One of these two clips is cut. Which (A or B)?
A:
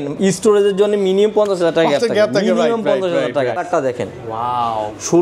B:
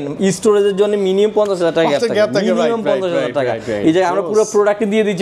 A